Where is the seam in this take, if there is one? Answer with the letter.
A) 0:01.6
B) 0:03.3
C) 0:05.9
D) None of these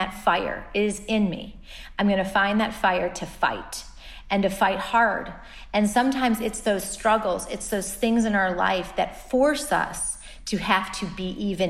D